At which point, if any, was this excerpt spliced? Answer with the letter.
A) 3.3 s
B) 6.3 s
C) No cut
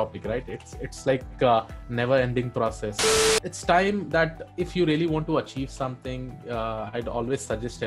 A